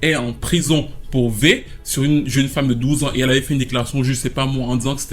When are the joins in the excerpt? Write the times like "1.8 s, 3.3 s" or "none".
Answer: none